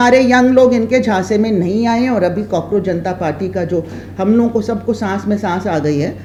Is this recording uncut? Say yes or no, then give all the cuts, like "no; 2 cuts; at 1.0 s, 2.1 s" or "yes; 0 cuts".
yes; 0 cuts